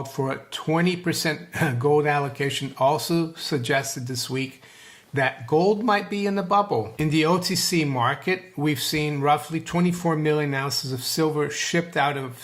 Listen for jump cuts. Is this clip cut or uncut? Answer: cut